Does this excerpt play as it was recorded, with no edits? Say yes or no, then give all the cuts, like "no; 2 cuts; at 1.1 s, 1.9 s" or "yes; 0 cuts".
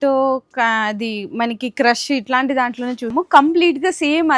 no; 1 cut; at 3.1 s